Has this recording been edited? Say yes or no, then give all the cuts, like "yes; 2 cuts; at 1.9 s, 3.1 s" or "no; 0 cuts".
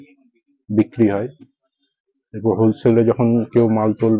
no; 0 cuts